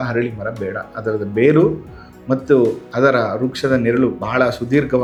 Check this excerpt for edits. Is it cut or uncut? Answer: uncut